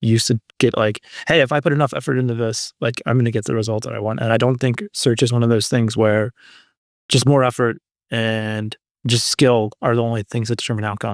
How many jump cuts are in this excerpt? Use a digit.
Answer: 0